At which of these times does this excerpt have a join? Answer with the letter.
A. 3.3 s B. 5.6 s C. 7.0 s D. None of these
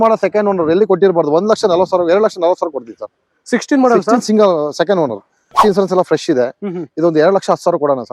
B